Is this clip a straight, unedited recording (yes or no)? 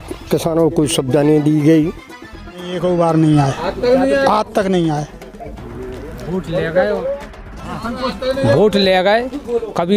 no